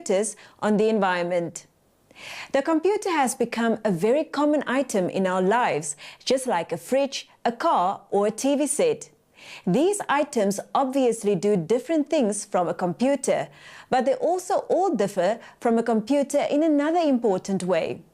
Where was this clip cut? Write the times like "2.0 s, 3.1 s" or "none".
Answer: 5.9 s

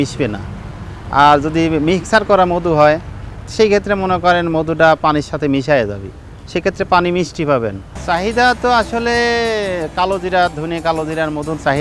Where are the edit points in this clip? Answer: 7.9 s

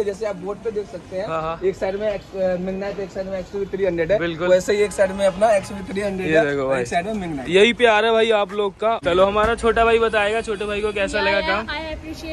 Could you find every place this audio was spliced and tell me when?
9.0 s

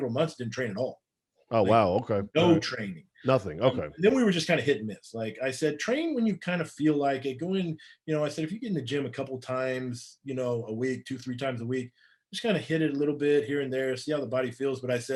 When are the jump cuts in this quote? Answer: none

